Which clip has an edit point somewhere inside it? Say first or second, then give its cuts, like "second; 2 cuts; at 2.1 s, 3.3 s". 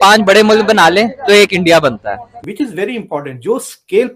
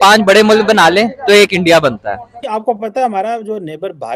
first; 1 cut; at 2.3 s